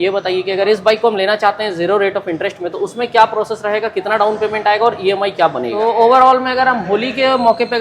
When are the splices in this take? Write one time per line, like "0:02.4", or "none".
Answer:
0:05.8